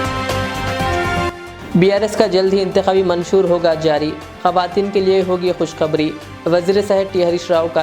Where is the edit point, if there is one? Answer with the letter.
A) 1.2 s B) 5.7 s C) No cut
A